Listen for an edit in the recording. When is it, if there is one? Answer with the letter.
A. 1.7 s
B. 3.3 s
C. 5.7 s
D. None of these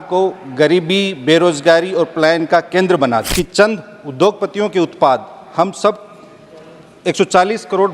B